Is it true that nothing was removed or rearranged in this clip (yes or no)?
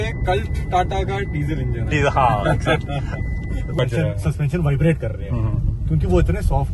no